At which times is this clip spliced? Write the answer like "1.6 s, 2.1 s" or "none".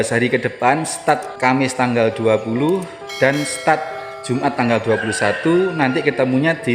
1.4 s